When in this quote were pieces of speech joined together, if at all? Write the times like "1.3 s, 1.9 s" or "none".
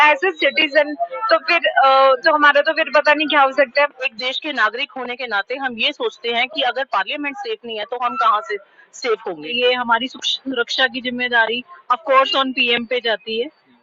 4.1 s, 9.5 s